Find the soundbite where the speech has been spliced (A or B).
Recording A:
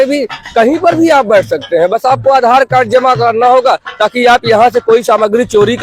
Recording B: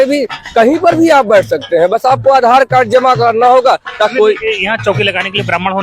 B